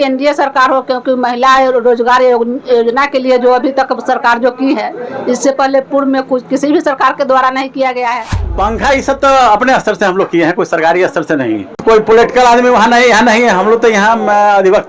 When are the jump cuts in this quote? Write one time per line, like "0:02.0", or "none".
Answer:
0:08.4
0:11.8